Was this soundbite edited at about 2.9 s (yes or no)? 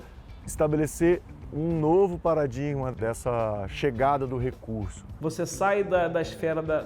yes